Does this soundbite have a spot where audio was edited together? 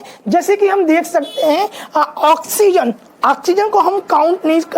no; 0 cuts

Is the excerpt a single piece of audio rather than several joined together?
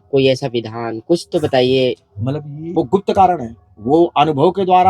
no; 1 cut; at 2.6 s

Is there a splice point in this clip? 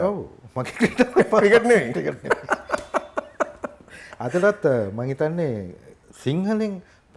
no; 0 cuts

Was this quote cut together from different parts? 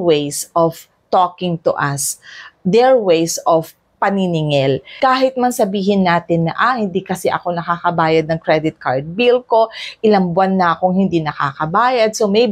yes; 1 cut; at 4.9 s

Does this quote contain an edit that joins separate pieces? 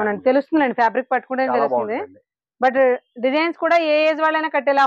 no; 0 cuts

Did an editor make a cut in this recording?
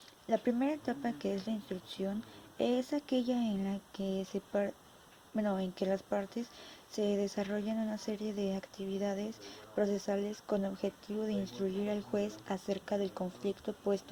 no; 0 cuts

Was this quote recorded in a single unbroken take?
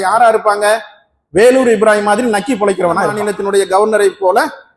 no; 1 cut; at 3.2 s

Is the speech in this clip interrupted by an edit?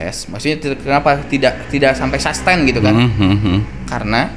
no; 0 cuts

